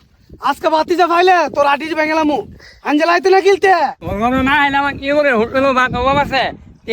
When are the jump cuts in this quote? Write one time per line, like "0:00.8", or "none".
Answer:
0:04.0